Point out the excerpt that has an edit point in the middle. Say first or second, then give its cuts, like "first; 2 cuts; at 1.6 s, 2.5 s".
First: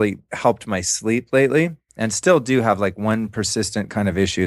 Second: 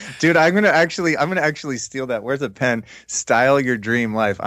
first; 1 cut; at 1.8 s